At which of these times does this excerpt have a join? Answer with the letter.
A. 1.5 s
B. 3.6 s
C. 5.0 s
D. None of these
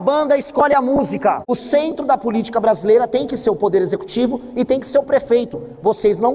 A